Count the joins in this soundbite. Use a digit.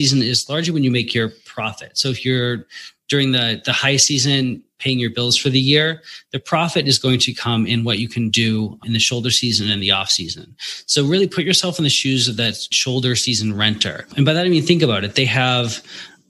4